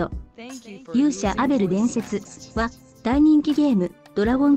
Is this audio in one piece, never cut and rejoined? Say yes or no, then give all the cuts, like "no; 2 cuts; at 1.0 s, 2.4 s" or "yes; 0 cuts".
no; 1 cut; at 1.6 s